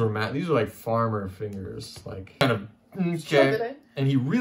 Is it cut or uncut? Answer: cut